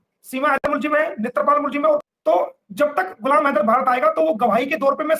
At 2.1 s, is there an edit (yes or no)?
yes